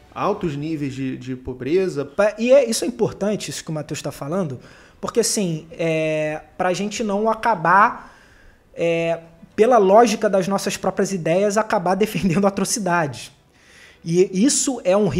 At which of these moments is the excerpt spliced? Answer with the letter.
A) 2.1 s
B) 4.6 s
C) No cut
A